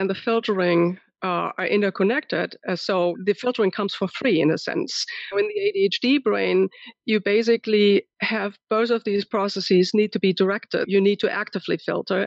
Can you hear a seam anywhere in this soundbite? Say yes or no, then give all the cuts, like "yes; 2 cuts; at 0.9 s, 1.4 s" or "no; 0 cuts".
yes; 3 cuts; at 3.2 s, 5.3 s, 10.9 s